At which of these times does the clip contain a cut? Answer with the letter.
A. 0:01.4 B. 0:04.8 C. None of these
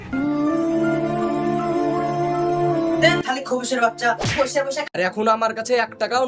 B